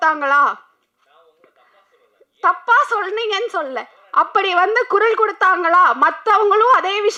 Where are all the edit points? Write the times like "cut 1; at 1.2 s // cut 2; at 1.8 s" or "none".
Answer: none